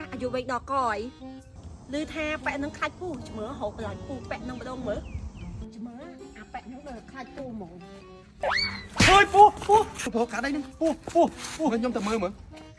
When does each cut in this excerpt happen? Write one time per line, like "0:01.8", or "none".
0:10.0